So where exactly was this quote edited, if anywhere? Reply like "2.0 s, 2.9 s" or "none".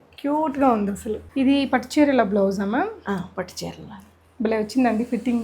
1.2 s